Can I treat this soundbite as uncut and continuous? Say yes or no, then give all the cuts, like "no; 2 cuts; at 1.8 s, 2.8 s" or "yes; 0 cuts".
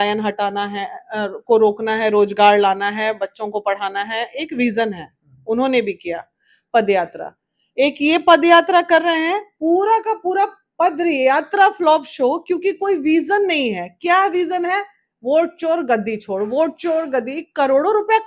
yes; 0 cuts